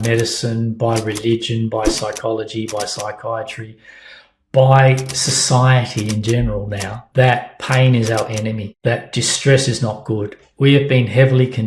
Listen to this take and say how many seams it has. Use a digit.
2